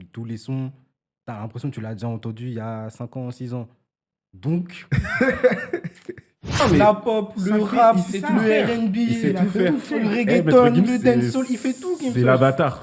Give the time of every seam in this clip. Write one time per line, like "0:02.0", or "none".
0:06.6